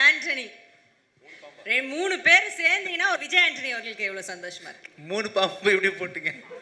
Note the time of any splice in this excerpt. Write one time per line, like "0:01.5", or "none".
0:03.2